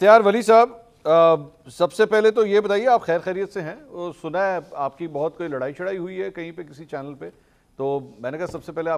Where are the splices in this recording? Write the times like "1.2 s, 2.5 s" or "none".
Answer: none